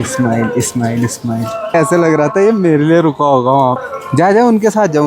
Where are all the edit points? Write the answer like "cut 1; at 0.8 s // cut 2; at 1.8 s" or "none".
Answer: cut 1; at 1.7 s // cut 2; at 3.9 s